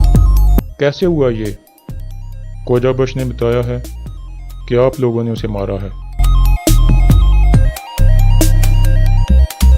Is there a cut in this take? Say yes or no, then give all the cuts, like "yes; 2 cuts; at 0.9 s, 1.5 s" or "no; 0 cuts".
yes; 1 cut; at 7.7 s